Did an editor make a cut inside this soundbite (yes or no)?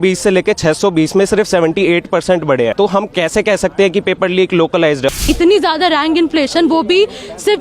yes